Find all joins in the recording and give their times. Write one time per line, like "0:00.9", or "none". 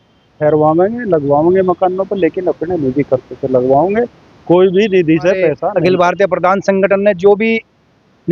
0:05.7